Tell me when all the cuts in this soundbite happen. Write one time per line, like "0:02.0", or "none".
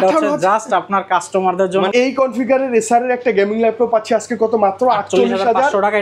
0:01.9

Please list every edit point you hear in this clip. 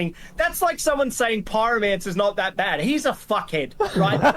0:03.2

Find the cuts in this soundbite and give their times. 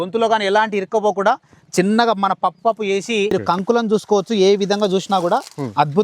0:03.3

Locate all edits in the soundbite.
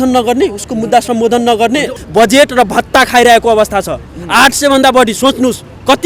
0:02.0

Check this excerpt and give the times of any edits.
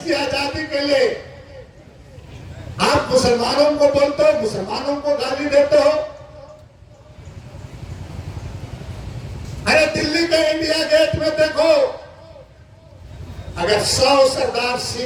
none

